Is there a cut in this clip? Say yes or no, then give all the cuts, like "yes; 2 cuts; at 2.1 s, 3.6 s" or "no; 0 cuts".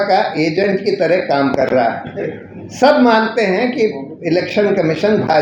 no; 0 cuts